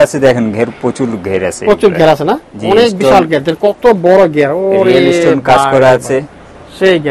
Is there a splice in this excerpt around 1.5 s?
no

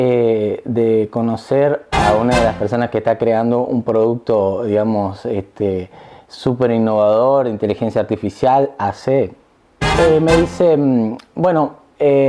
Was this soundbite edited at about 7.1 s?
no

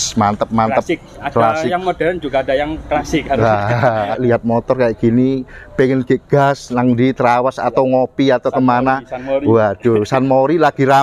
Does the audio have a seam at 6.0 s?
no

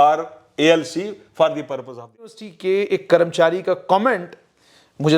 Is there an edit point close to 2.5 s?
yes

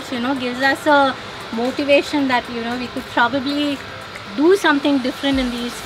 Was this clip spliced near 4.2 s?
no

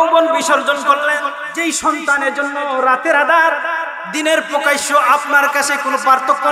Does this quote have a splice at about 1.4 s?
yes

